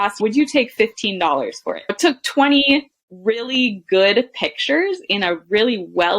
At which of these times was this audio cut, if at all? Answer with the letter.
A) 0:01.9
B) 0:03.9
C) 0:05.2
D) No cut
A